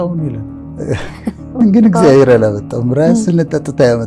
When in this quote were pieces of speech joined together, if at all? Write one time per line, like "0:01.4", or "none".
0:01.6